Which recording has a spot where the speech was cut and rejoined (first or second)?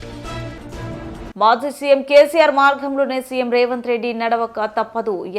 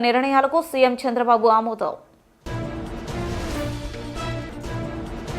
first